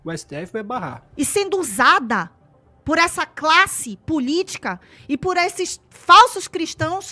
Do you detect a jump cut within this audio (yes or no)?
yes